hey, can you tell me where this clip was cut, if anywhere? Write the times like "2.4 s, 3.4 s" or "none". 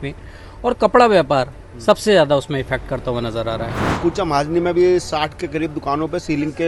3.9 s